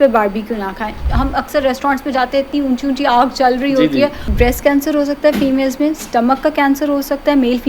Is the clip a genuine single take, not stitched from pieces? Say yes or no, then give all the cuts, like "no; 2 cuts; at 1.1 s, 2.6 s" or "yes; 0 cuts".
no; 2 cuts; at 1.0 s, 4.3 s